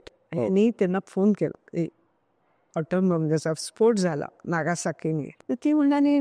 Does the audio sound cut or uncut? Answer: uncut